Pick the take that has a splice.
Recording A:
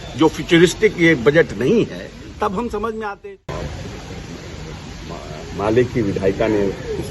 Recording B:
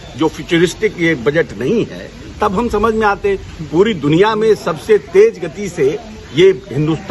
A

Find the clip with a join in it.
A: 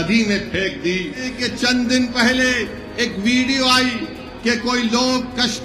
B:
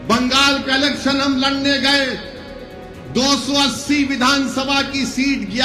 A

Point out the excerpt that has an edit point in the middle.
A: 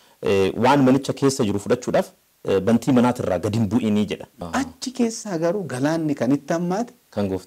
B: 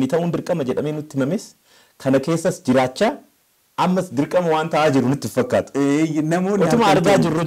A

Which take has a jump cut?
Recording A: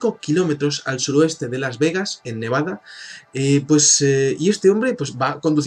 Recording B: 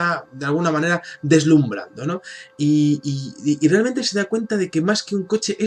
B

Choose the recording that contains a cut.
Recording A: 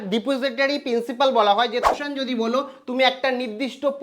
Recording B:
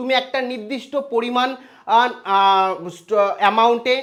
A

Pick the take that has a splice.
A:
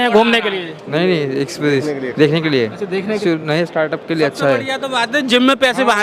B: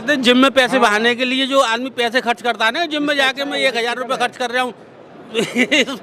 A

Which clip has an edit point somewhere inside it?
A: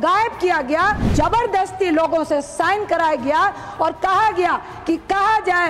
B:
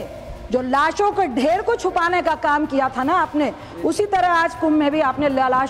A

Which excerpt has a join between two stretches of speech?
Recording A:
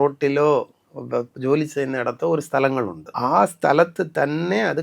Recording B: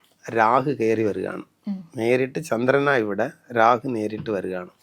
A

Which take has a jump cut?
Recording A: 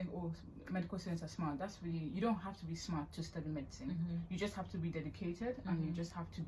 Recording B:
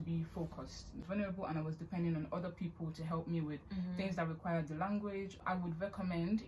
B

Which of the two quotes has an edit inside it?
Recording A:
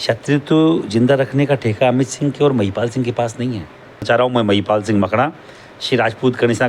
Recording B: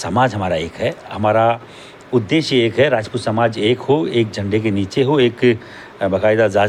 A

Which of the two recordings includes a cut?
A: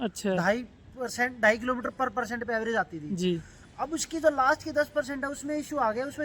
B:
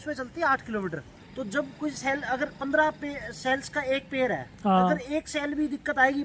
B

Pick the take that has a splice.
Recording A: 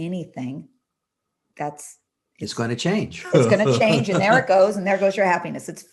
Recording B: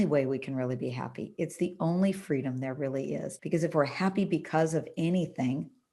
B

